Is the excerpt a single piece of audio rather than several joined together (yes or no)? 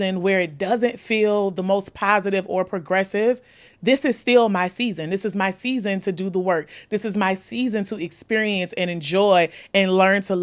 yes